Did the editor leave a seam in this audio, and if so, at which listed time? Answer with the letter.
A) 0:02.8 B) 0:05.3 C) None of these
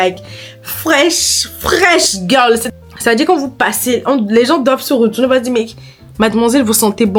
C